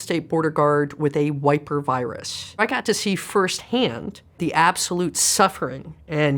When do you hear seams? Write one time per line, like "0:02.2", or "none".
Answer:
0:02.6
0:04.4